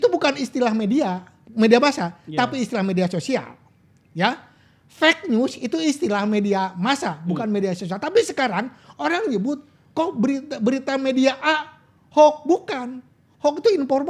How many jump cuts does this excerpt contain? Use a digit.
0